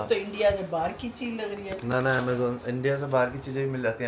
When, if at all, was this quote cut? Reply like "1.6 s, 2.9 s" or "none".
none